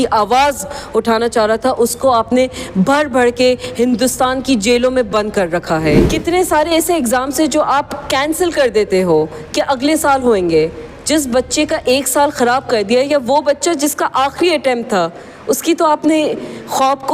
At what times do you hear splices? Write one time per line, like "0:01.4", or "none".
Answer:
0:06.0